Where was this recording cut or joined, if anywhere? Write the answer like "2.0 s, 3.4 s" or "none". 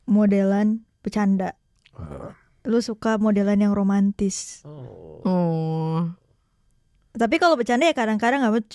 none